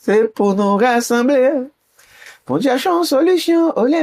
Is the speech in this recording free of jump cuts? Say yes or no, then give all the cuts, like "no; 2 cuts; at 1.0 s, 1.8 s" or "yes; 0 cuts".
yes; 0 cuts